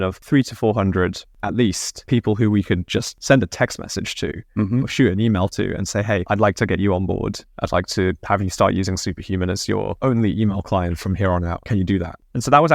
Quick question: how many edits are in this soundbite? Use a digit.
1